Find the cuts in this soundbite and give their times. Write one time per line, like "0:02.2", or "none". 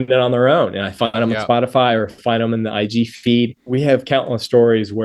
0:03.6